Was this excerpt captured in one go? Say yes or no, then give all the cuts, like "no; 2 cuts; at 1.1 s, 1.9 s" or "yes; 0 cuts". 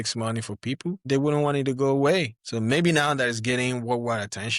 no; 2 cuts; at 1.0 s, 2.4 s